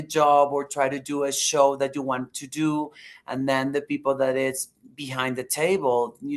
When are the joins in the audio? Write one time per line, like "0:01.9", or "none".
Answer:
none